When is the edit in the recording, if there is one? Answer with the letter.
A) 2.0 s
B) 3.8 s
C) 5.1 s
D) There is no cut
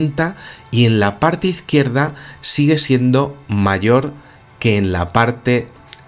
B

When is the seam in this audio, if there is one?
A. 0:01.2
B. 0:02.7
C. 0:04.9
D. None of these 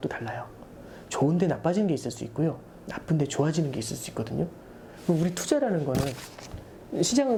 D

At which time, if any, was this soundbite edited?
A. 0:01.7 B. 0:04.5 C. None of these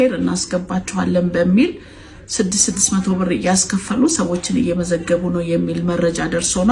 C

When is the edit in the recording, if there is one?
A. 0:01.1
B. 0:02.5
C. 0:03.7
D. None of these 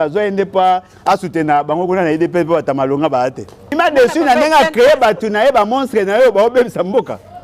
C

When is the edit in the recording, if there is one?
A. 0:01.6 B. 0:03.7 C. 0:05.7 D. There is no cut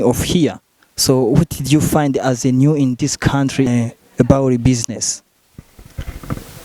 B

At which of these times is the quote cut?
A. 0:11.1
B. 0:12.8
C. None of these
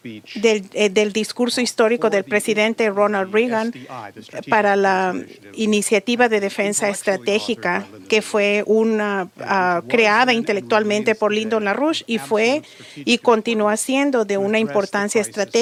C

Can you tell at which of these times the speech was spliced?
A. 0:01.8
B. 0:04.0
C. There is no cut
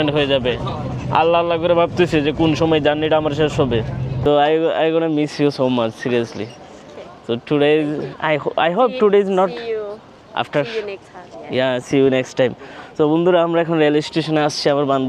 B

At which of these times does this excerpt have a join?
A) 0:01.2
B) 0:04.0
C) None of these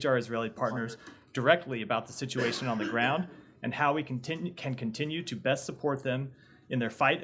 C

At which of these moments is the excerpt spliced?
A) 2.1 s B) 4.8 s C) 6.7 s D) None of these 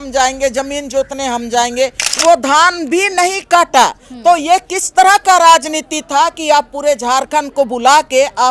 A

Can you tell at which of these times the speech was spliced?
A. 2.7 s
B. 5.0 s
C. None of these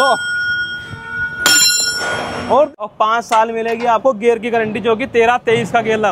A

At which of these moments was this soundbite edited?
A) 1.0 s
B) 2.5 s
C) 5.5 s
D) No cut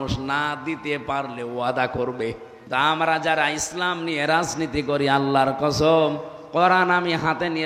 B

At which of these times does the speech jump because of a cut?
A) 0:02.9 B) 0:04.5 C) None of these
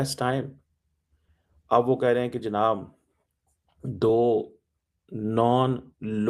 C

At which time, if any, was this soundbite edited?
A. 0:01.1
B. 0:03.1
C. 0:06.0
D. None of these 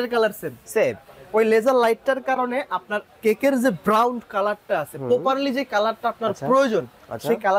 D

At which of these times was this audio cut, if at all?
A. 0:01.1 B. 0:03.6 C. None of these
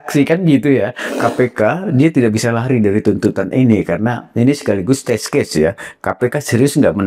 A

